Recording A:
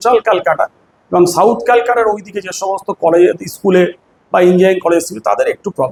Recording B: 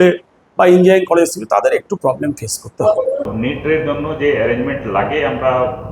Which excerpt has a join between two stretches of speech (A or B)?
B